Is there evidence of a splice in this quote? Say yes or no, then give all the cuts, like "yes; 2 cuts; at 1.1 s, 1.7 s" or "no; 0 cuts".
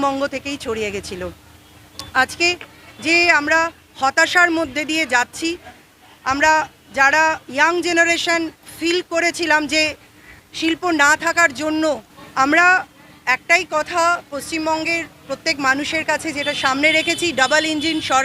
yes; 1 cut; at 12.1 s